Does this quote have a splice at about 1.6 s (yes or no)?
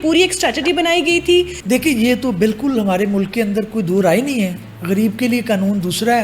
yes